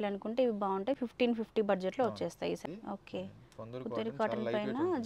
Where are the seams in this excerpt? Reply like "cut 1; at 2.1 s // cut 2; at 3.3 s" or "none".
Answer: cut 1; at 2.6 s

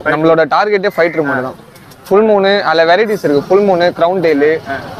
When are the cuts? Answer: none

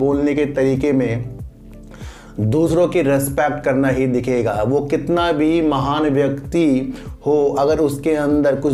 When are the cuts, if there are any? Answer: none

